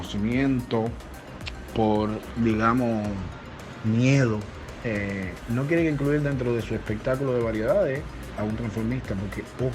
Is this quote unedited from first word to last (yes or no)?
no